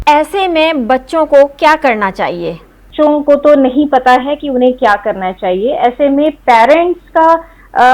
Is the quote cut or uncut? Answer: cut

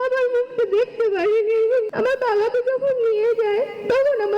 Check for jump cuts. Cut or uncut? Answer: cut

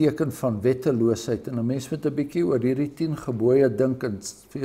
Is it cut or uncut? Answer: uncut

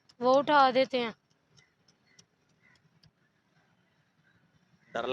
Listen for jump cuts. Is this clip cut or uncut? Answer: uncut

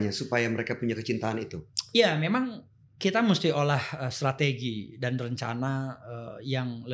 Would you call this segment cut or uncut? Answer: uncut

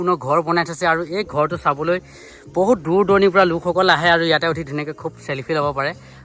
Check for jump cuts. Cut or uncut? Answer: uncut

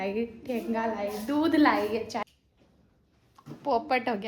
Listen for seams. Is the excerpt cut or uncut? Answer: cut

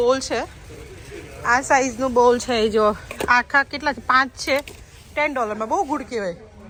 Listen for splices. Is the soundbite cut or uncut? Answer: uncut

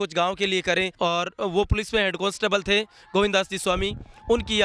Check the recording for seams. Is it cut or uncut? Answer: cut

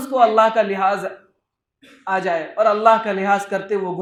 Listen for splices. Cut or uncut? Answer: uncut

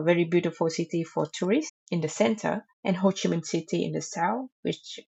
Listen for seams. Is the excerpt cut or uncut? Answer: uncut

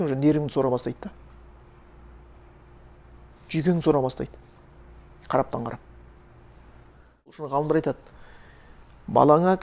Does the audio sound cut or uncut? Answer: cut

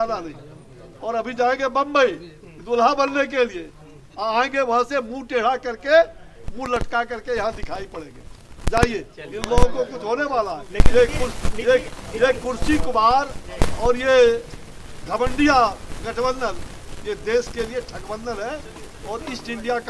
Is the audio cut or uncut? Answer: uncut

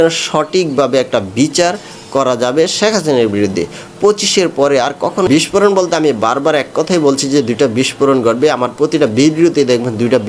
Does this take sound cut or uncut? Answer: cut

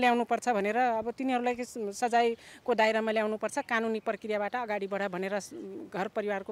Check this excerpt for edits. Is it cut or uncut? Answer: uncut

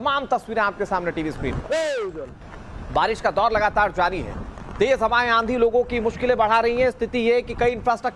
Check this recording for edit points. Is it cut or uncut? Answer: cut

